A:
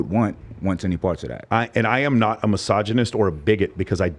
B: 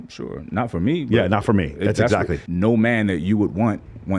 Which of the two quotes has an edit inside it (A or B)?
B